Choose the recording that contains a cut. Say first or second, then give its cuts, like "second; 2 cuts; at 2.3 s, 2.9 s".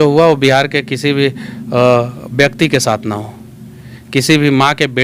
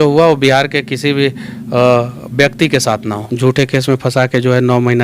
second; 1 cut; at 3.2 s